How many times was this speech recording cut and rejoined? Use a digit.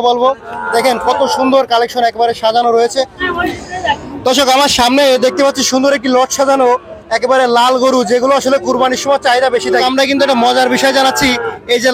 2